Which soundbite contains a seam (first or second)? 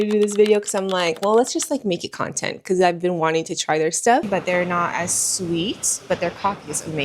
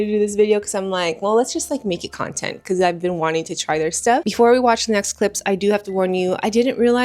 first